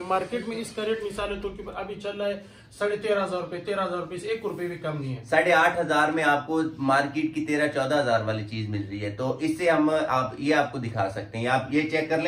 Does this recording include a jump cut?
no; 0 cuts

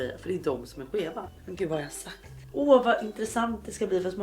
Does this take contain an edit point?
yes; 2 cuts; at 1.4 s, 2.4 s

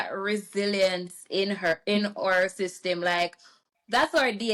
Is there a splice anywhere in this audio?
no; 0 cuts

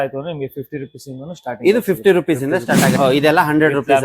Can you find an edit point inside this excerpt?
yes; 1 cut; at 2.9 s

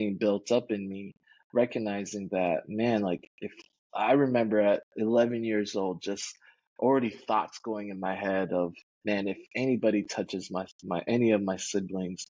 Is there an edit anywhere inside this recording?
yes; 1 cut; at 8.9 s

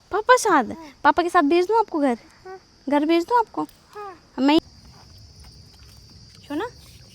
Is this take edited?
yes; 1 cut; at 4.6 s

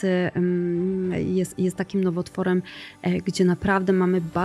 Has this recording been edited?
no; 0 cuts

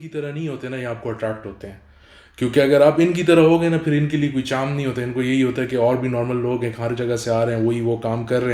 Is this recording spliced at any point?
no; 0 cuts

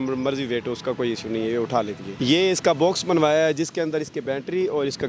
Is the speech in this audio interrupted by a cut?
yes; 1 cut; at 2.1 s

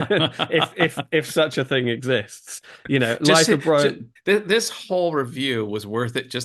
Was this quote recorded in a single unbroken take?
no; 1 cut; at 4.1 s

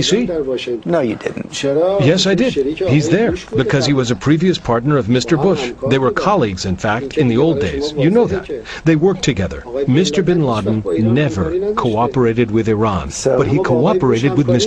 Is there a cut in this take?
no; 0 cuts

